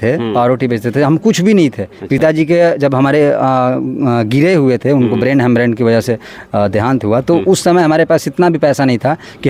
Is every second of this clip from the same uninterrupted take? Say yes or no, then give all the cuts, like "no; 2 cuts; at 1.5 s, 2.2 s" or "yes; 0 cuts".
yes; 0 cuts